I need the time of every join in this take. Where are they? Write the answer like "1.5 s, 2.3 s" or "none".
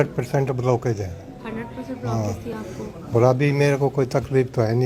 none